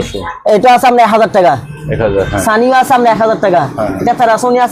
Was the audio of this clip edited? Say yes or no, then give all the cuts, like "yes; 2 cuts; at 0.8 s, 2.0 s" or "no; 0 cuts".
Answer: no; 0 cuts